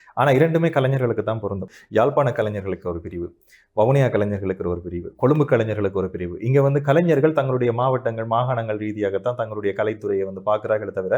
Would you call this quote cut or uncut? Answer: cut